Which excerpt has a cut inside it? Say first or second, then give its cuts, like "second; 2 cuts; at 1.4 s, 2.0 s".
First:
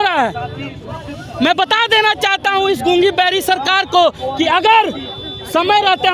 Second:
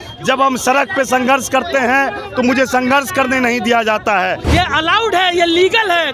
second; 1 cut; at 4.4 s